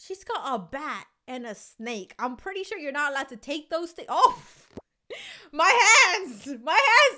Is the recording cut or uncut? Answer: uncut